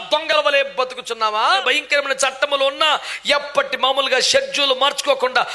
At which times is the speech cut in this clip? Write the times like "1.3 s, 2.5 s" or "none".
1.6 s